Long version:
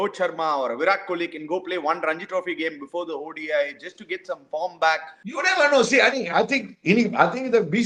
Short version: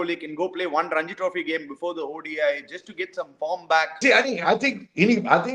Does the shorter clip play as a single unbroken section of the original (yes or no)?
no